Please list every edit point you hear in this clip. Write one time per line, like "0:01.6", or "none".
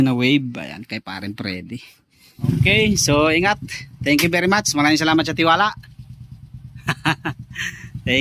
0:02.4